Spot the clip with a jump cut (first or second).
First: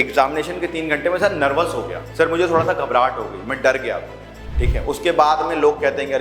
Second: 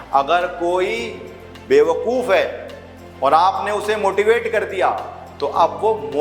first